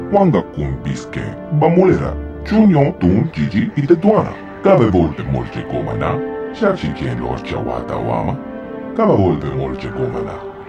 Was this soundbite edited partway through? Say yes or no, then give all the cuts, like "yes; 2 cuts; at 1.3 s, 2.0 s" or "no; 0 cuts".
yes; 1 cut; at 6.2 s